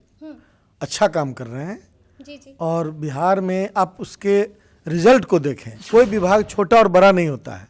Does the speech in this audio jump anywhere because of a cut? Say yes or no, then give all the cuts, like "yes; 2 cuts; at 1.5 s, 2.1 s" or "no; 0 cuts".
yes; 1 cut; at 5.7 s